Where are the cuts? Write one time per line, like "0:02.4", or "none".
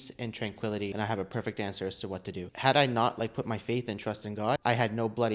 0:00.9
0:02.4
0:04.6